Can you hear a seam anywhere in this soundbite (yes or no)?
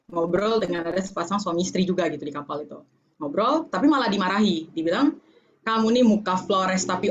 no